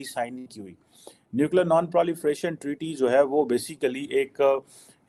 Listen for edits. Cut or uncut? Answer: uncut